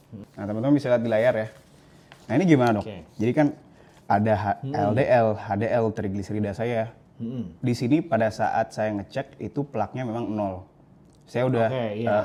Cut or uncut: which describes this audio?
uncut